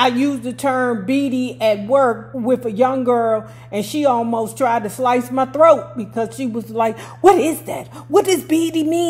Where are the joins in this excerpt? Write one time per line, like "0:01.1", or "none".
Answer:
0:02.3